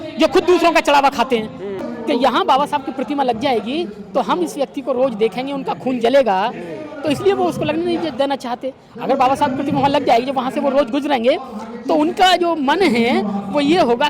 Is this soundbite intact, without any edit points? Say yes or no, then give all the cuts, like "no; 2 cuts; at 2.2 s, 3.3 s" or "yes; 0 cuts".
no; 1 cut; at 1.9 s